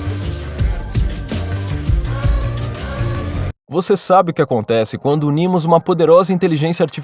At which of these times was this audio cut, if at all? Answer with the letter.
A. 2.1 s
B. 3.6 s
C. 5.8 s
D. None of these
B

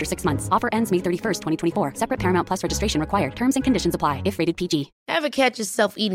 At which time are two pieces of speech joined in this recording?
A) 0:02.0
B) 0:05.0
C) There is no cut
B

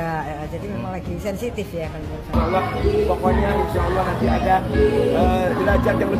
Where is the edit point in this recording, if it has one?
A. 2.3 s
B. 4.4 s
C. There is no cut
A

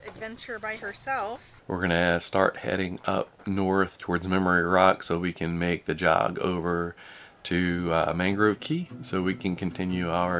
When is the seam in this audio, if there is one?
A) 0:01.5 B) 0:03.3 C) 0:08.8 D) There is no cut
A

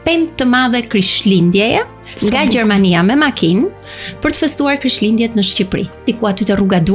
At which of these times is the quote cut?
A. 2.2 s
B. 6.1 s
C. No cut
B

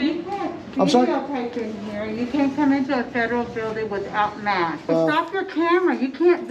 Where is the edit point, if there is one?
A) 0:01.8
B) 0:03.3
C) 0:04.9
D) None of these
C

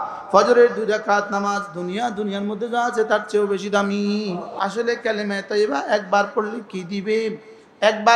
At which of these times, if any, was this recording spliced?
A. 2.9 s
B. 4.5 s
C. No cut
B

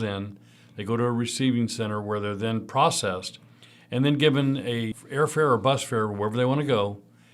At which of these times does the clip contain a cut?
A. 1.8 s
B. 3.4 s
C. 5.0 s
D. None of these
C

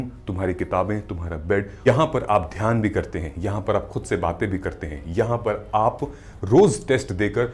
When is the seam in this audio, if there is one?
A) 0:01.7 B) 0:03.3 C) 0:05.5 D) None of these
A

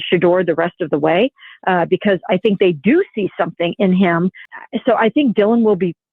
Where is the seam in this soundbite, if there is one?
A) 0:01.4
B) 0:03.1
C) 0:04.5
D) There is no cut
C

